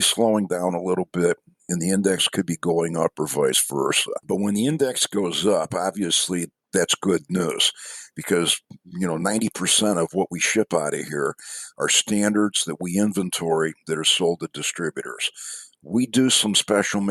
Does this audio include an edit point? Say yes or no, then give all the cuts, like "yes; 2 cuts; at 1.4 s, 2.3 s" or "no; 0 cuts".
no; 0 cuts